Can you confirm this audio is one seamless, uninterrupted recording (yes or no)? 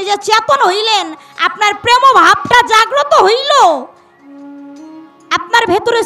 yes